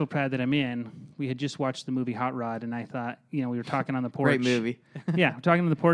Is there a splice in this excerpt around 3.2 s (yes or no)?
no